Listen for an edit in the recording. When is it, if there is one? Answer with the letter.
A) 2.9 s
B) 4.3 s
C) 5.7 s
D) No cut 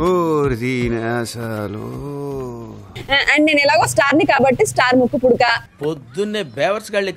A